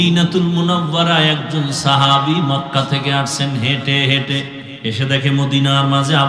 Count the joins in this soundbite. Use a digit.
1